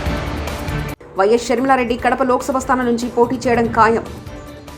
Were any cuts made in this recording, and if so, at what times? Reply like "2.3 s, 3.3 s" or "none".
0.9 s